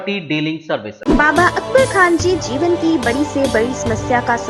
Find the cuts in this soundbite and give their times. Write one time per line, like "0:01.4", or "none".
0:00.9